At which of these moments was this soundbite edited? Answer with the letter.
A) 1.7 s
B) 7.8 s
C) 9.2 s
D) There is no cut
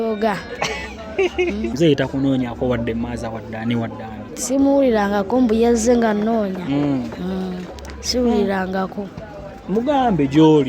A